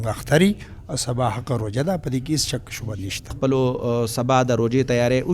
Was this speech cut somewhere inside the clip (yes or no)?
yes